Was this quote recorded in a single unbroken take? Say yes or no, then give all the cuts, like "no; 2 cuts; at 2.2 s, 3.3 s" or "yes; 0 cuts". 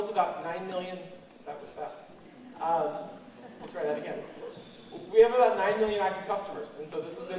no; 1 cut; at 2.5 s